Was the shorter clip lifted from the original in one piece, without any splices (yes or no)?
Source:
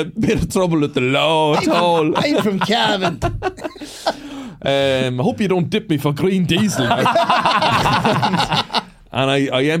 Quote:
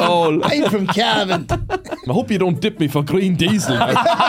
no